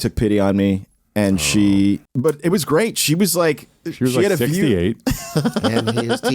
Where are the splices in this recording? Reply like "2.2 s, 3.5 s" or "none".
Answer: 2.0 s